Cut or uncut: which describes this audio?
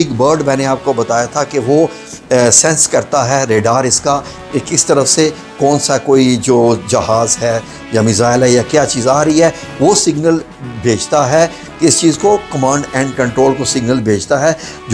uncut